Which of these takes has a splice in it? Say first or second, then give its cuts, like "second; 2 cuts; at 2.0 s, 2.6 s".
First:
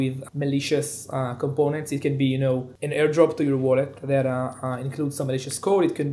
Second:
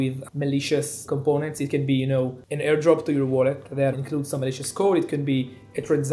second; 2 cuts; at 1.0 s, 3.9 s